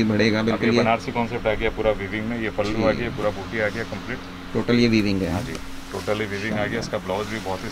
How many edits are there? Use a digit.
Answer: 0